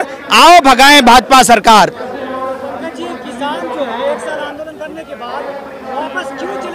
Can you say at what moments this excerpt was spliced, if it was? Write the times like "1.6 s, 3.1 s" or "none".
none